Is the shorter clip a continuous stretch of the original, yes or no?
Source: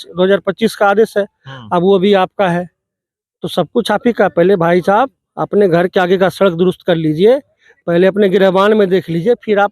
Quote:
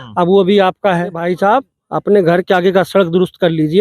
no